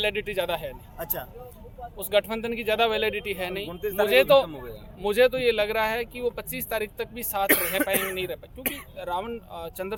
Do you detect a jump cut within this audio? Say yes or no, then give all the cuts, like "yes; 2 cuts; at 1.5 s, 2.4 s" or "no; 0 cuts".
no; 0 cuts